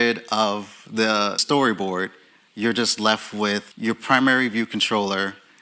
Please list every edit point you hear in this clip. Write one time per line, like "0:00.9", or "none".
0:01.4
0:03.7